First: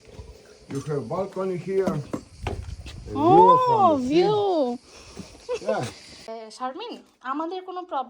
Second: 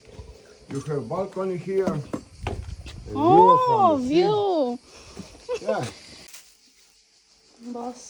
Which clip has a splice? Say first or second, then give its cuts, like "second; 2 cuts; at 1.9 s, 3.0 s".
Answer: first; 1 cut; at 6.3 s